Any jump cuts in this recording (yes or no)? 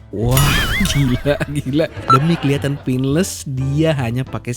yes